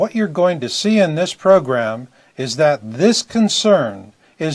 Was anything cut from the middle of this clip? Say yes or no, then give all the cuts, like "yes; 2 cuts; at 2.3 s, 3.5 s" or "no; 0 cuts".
yes; 1 cut; at 1.1 s